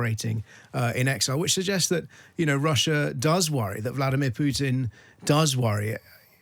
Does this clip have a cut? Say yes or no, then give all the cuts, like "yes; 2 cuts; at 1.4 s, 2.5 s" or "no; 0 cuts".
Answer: no; 0 cuts